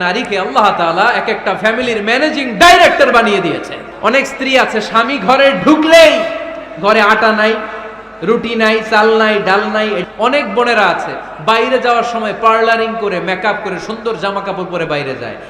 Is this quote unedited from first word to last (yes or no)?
no